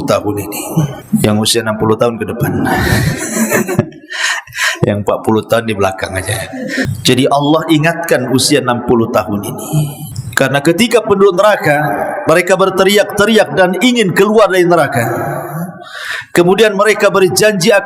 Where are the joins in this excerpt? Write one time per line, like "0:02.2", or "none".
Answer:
0:01.0
0:06.9